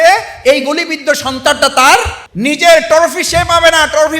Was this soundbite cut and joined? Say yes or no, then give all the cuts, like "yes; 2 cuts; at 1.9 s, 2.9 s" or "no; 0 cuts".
yes; 1 cut; at 2.2 s